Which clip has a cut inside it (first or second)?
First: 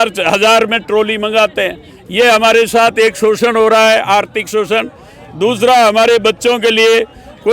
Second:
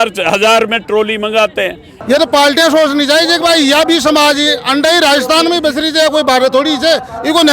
second